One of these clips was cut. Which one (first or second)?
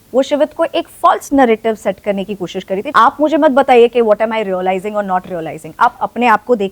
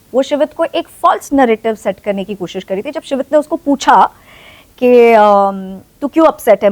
first